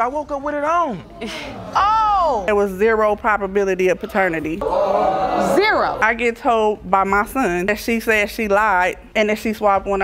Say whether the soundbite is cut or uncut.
cut